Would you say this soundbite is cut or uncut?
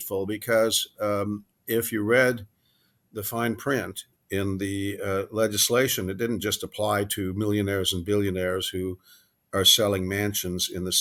uncut